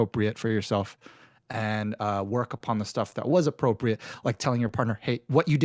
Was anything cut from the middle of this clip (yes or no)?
no